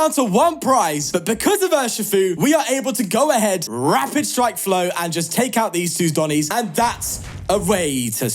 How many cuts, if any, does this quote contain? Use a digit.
4